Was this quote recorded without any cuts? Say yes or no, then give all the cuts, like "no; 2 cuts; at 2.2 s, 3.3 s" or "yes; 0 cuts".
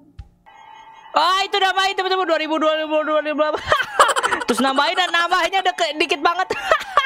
yes; 0 cuts